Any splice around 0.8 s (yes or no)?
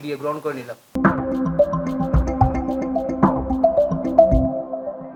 no